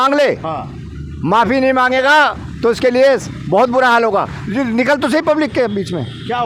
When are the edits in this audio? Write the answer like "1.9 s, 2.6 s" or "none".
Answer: none